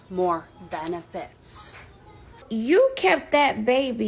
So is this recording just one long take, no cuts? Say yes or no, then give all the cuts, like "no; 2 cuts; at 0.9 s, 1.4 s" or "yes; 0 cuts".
no; 1 cut; at 2.4 s